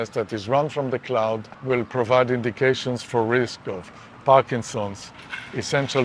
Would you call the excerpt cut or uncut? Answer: cut